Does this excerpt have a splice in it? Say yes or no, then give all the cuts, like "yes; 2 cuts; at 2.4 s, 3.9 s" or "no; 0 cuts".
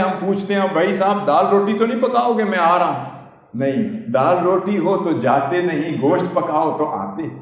no; 0 cuts